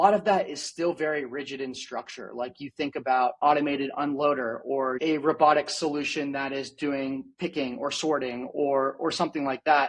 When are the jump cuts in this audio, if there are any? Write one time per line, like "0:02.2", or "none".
0:03.4
0:05.0